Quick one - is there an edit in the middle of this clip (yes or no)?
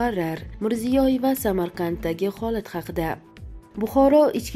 yes